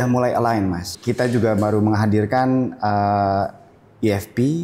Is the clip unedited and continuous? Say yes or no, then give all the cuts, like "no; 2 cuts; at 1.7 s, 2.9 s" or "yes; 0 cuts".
no; 1 cut; at 0.9 s